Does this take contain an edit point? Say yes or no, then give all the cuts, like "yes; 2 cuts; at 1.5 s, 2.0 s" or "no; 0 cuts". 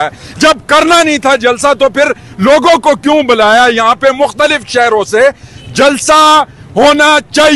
no; 0 cuts